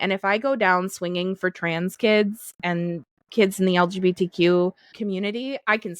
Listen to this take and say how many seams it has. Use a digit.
2